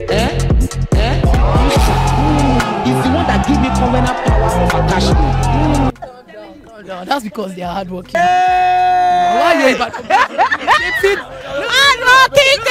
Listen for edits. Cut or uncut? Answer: uncut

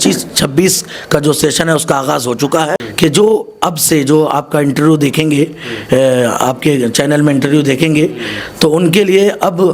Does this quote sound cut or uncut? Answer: cut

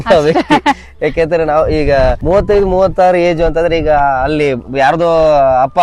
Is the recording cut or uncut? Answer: cut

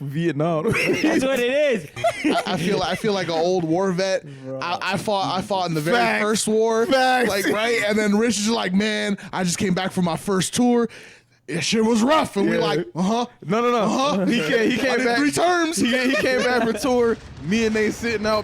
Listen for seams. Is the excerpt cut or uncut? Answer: cut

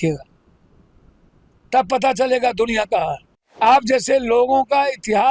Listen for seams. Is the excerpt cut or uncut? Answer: cut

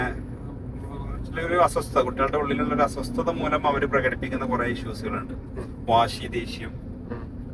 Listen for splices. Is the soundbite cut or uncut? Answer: uncut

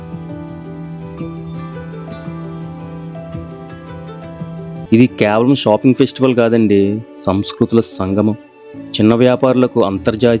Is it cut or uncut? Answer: cut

